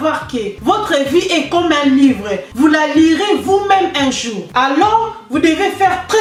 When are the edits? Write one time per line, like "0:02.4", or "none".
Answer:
none